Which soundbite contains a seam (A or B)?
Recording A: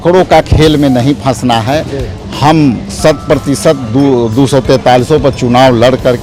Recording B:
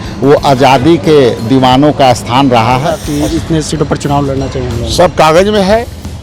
B